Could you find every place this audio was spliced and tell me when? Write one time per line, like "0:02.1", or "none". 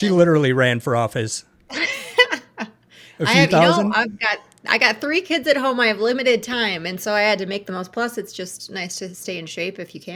none